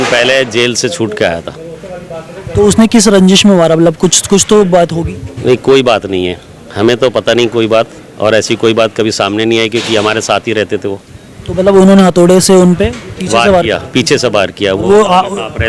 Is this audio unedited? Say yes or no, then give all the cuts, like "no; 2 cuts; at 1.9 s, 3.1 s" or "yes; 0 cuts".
yes; 0 cuts